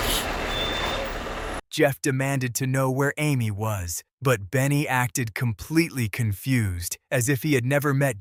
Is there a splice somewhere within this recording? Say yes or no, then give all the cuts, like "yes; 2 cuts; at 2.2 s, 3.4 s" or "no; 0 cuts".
no; 0 cuts